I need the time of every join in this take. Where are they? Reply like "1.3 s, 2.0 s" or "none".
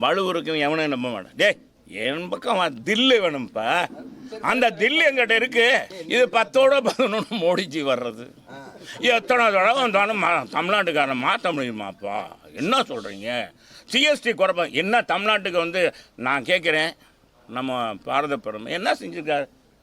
5.9 s